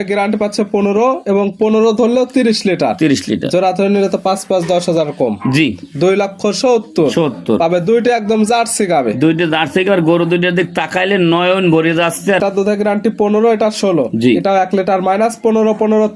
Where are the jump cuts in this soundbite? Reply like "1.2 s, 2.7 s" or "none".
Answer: 12.4 s

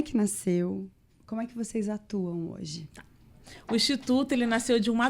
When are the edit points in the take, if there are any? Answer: none

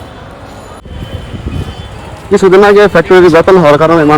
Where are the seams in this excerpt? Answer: 0.9 s

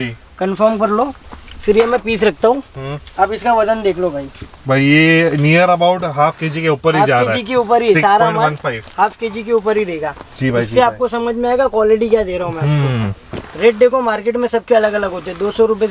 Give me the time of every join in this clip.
none

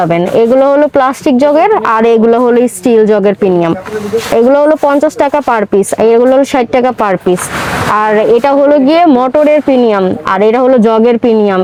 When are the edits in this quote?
none

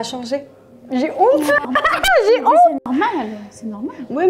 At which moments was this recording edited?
none

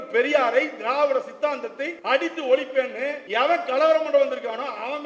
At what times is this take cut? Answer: 1.9 s, 3.2 s

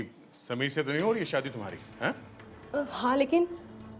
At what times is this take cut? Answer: 2.5 s

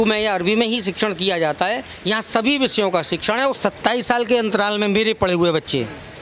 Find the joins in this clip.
3.6 s

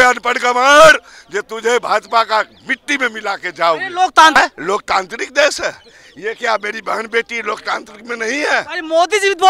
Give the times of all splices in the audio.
4.4 s

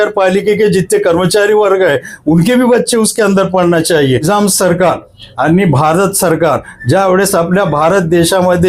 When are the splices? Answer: 4.2 s

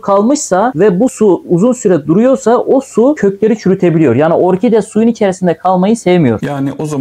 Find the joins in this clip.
none

